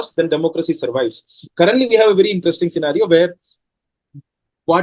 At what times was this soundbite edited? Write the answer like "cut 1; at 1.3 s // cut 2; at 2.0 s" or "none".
cut 1; at 1.2 s

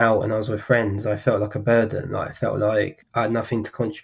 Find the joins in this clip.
cut 1; at 3.0 s

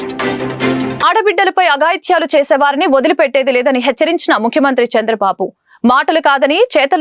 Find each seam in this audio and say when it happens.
cut 1; at 1.0 s

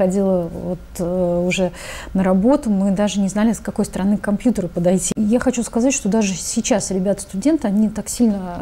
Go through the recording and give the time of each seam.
cut 1; at 5.1 s

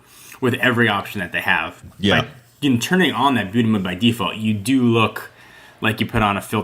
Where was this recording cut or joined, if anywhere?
cut 1; at 1.8 s

